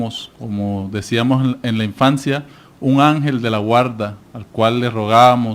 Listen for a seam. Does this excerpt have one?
no; 0 cuts

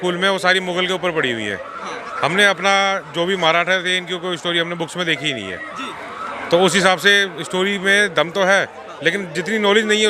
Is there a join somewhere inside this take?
no; 0 cuts

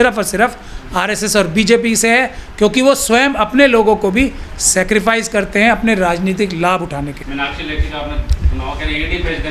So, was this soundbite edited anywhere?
no; 0 cuts

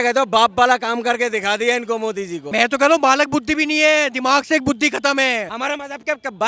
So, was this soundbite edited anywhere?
yes; 2 cuts; at 2.4 s, 5.5 s

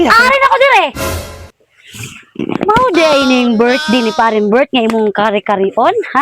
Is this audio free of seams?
no; 1 cut; at 0.9 s

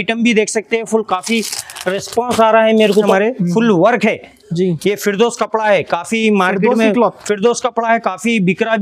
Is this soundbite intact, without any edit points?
no; 1 cut; at 3.0 s

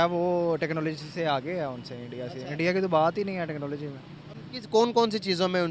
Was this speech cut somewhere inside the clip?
no; 0 cuts

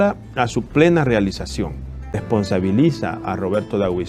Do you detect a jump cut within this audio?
yes; 1 cut; at 2.2 s

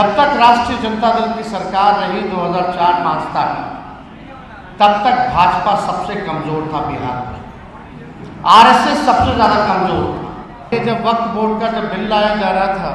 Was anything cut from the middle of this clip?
yes; 1 cut; at 10.7 s

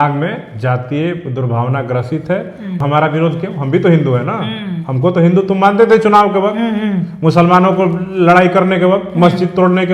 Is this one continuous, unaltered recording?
no; 1 cut; at 2.8 s

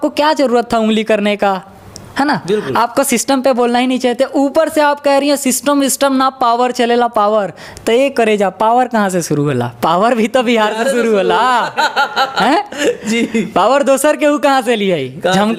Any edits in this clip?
no; 0 cuts

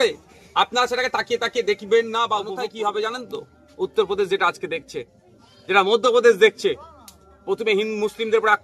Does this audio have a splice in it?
yes; 1 cut; at 2.5 s

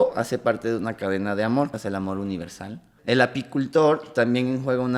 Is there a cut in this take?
yes; 2 cuts; at 1.7 s, 2.9 s

